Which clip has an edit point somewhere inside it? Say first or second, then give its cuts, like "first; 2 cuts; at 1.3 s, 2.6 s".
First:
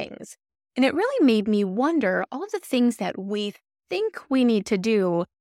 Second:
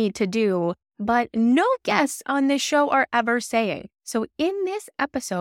second; 1 cut; at 3.9 s